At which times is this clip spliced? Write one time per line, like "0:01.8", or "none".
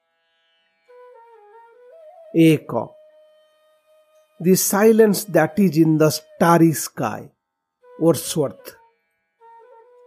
none